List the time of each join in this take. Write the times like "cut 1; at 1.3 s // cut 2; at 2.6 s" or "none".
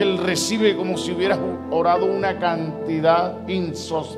none